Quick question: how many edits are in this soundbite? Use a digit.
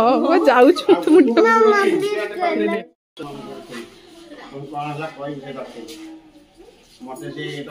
1